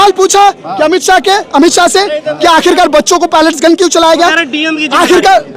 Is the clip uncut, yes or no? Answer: yes